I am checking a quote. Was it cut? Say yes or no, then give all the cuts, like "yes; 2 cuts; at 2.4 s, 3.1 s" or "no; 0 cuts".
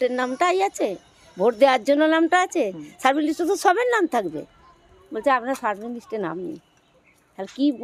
no; 0 cuts